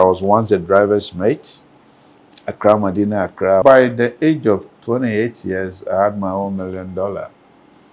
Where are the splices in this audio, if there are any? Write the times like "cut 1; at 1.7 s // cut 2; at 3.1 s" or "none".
cut 1; at 3.6 s